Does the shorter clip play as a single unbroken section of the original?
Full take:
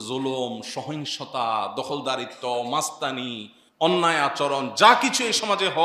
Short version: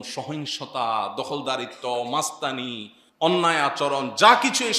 yes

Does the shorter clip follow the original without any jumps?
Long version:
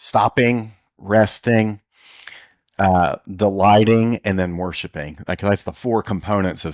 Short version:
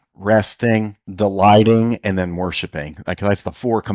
no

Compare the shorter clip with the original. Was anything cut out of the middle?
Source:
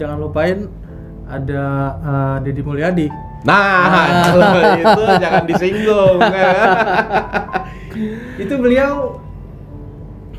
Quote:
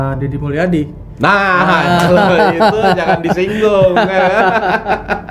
no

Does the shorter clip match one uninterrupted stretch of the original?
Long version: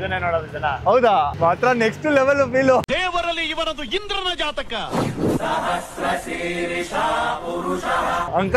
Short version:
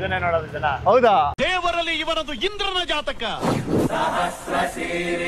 no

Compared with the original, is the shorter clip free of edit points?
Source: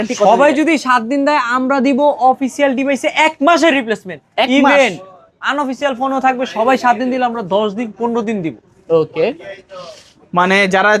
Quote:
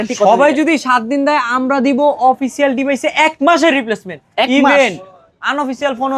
yes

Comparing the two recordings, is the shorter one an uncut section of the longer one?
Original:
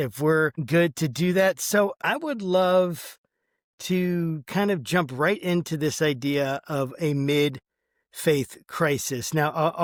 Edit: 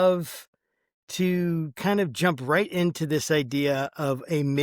yes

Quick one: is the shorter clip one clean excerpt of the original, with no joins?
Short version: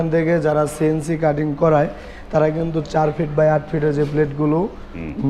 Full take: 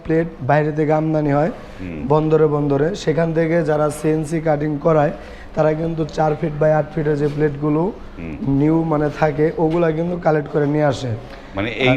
yes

